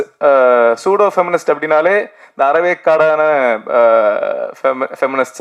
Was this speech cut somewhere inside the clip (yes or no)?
no